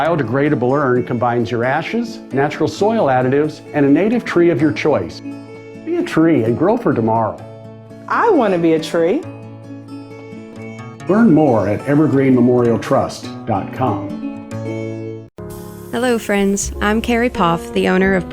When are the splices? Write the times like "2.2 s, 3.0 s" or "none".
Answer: 15.2 s